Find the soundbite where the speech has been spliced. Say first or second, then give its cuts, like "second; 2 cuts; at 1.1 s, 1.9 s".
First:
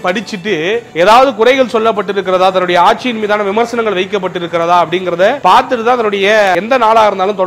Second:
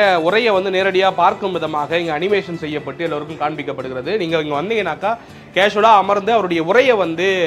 first; 2 cuts; at 5.4 s, 6.5 s